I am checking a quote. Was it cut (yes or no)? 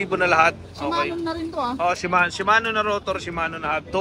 no